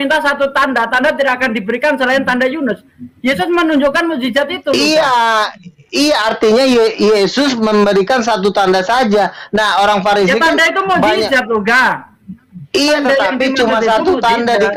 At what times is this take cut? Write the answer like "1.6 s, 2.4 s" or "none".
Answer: none